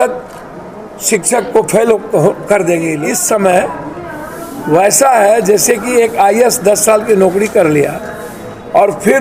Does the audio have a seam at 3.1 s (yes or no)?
yes